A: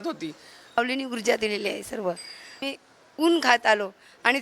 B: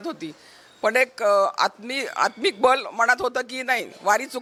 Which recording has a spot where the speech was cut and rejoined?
A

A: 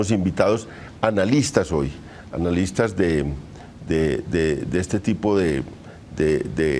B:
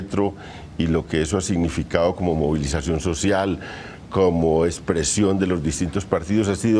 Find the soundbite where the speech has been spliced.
B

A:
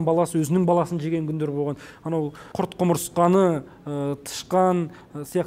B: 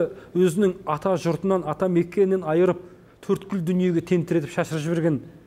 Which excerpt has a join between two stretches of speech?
A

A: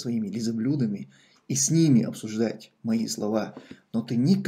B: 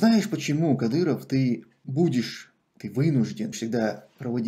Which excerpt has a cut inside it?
B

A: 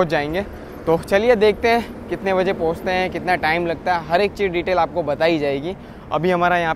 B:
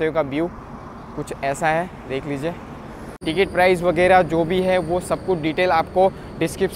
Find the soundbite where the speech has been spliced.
B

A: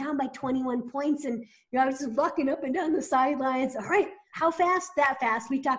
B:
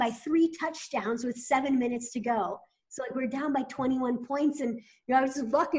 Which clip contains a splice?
A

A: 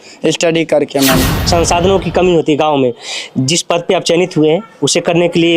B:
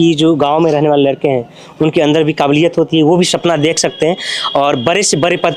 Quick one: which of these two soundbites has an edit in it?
A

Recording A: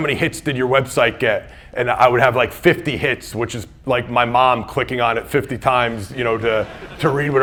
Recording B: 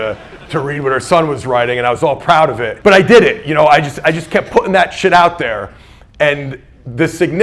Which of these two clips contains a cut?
B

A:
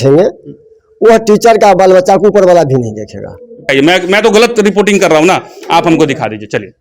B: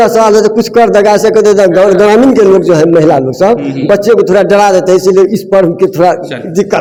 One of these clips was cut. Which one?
A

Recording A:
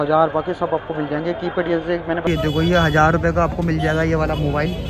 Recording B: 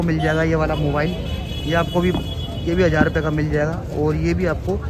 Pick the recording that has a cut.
A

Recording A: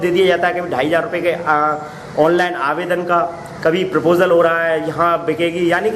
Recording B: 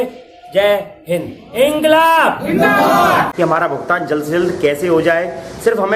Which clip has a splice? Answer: B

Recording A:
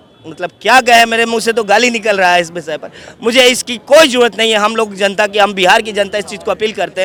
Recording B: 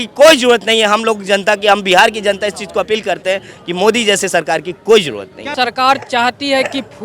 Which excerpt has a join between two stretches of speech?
B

